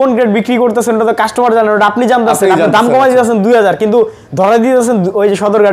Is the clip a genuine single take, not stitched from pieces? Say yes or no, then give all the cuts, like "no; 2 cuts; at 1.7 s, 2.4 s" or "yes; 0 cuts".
yes; 0 cuts